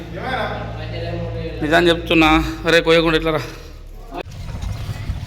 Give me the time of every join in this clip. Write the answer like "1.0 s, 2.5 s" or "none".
4.2 s